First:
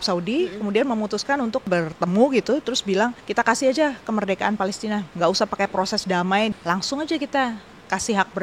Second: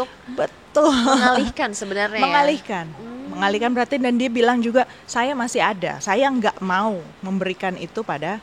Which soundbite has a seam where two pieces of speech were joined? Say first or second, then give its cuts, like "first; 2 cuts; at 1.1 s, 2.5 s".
first; 4 cuts; at 1.7 s, 3.2 s, 5.1 s, 6.5 s